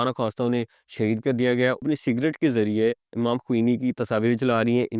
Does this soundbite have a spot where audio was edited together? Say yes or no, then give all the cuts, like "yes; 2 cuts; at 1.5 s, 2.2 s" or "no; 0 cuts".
yes; 2 cuts; at 1.8 s, 4.0 s